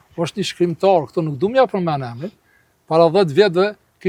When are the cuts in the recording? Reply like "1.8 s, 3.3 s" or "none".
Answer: none